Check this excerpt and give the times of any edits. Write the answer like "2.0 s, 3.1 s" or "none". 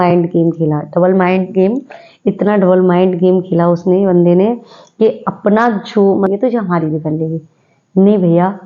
6.3 s